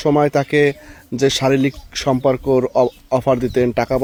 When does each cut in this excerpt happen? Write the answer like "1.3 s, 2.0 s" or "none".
none